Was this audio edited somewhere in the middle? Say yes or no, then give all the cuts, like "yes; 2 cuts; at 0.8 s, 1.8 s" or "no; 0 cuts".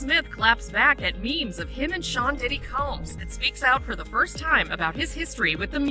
no; 0 cuts